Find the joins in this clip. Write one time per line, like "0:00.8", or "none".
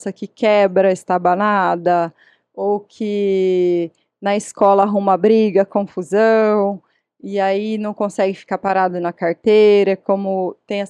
none